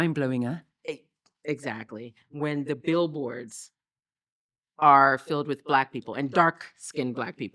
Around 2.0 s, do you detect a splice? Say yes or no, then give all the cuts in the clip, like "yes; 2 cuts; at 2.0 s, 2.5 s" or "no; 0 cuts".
no; 0 cuts